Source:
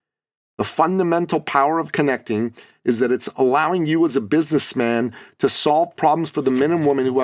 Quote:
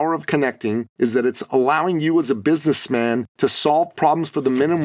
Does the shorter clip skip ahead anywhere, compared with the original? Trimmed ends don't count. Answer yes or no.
yes